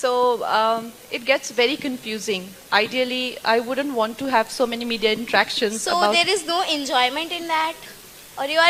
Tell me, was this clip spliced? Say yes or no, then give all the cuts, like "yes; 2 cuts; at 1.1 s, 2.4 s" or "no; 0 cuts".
no; 0 cuts